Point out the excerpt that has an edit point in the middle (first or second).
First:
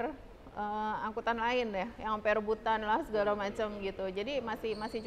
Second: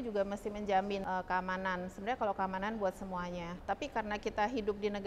second